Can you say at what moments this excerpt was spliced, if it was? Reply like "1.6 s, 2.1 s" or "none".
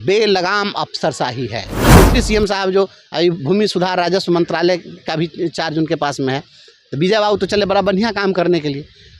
1.7 s